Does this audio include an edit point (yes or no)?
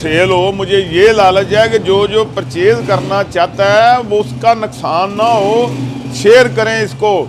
no